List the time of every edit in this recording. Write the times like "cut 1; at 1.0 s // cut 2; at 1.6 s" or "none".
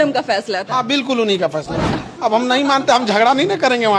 cut 1; at 1.9 s